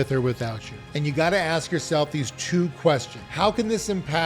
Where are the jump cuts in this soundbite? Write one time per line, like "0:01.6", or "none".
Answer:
0:00.9